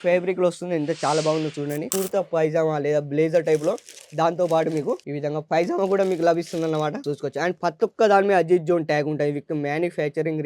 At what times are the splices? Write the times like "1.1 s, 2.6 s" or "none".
1.9 s